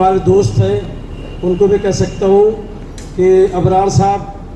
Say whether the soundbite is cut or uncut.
uncut